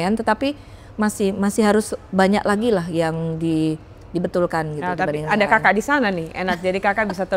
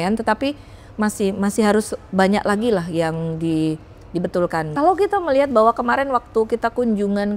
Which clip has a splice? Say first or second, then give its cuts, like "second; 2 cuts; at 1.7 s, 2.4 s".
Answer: second; 1 cut; at 4.7 s